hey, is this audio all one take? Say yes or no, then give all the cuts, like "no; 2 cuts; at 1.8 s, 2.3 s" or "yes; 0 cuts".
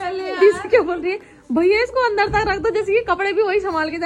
yes; 0 cuts